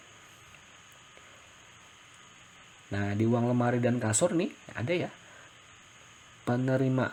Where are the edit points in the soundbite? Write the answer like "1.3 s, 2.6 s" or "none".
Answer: none